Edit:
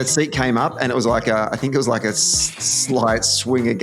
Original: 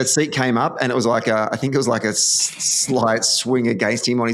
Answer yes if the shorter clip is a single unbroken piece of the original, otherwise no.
yes